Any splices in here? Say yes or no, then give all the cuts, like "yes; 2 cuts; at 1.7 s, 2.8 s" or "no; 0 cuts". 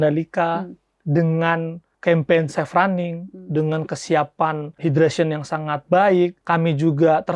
yes; 3 cuts; at 1.8 s, 4.7 s, 6.4 s